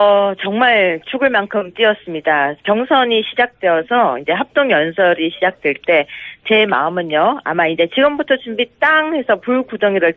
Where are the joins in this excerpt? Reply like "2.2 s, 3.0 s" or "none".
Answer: none